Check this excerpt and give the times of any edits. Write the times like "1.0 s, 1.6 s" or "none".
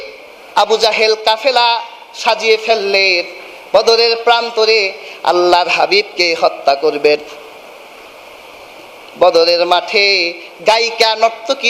none